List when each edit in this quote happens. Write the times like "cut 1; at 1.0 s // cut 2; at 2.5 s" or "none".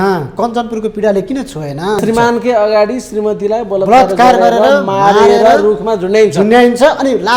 cut 1; at 2.0 s